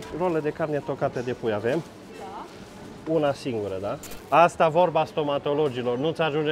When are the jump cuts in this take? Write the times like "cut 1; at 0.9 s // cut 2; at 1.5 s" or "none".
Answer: cut 1; at 4.2 s